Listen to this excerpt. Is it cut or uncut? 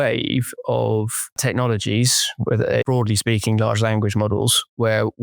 cut